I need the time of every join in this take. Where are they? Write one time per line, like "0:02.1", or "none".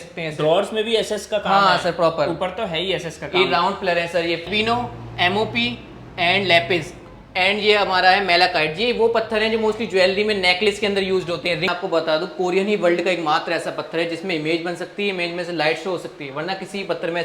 0:04.5
0:11.7